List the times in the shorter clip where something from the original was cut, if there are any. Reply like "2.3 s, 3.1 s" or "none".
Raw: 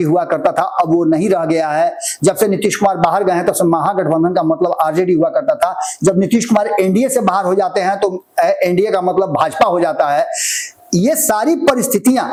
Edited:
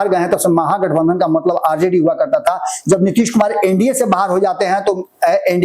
none